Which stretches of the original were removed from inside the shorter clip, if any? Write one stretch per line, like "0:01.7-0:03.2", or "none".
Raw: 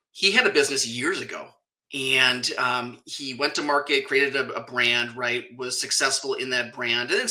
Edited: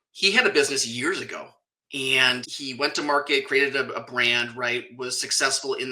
0:02.5-0:03.1